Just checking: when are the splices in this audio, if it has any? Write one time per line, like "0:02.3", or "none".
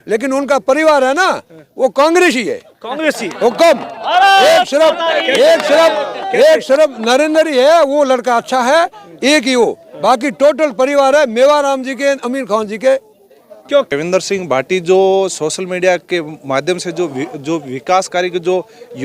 0:13.9